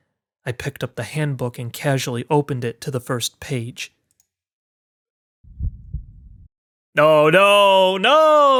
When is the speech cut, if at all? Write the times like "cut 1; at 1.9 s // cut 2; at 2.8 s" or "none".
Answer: none